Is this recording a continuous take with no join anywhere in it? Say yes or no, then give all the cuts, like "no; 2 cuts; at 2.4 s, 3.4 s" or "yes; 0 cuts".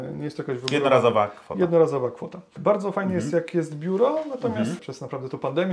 no; 2 cuts; at 2.5 s, 4.8 s